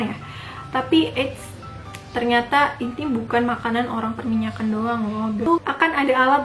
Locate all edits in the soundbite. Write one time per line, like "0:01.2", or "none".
0:05.5

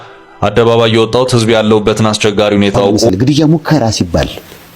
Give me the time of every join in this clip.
0:03.1

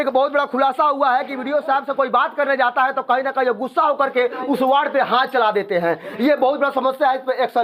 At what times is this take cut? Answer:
none

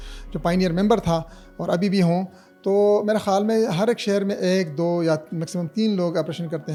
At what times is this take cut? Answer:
none

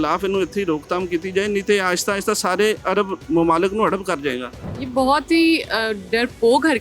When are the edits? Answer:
0:04.6

